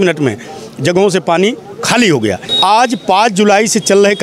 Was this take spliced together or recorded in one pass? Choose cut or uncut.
cut